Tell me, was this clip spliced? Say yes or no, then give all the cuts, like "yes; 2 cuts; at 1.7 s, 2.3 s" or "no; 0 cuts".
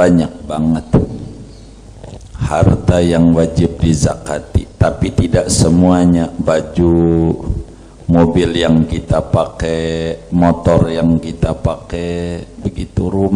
no; 0 cuts